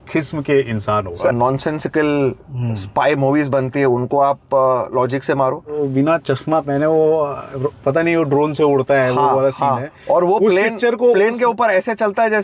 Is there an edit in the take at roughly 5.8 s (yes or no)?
yes